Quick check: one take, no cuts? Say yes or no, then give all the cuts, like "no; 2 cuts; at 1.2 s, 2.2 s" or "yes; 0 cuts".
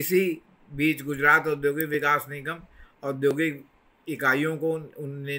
no; 1 cut; at 1.9 s